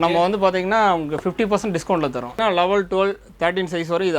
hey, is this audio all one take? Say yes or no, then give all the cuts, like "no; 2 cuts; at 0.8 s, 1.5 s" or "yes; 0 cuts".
no; 1 cut; at 2.4 s